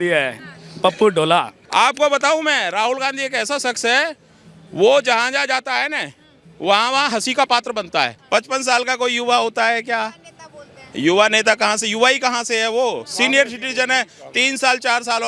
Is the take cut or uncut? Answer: cut